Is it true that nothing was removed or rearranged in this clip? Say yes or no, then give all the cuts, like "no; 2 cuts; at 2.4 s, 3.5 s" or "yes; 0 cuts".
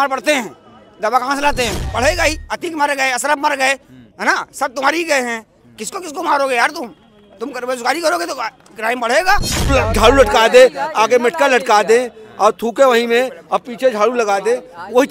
no; 2 cuts; at 1.9 s, 9.7 s